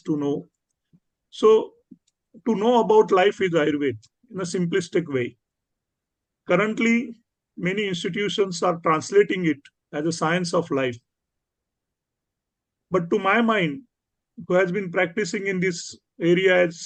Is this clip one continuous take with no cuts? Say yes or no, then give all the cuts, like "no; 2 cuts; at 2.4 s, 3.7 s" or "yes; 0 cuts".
yes; 0 cuts